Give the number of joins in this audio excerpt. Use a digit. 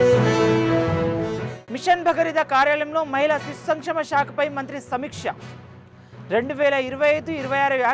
0